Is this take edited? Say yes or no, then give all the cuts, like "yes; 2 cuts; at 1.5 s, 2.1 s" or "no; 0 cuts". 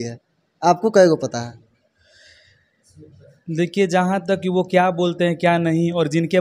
no; 0 cuts